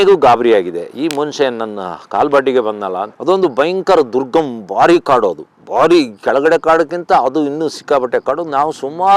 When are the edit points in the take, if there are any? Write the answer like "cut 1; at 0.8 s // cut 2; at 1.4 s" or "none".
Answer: cut 1; at 3.1 s